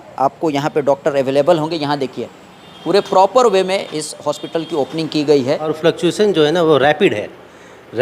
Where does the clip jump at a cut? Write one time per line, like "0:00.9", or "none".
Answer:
0:05.7